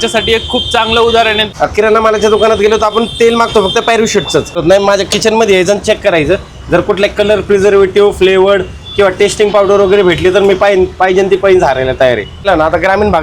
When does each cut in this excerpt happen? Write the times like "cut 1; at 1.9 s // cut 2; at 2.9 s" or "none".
cut 1; at 1.4 s // cut 2; at 4.6 s // cut 3; at 12.5 s